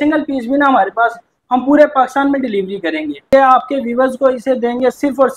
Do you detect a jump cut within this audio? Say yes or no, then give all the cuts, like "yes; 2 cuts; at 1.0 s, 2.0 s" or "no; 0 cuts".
yes; 1 cut; at 3.3 s